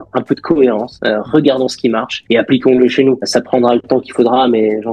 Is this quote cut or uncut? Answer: uncut